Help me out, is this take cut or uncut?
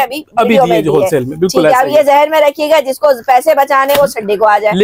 uncut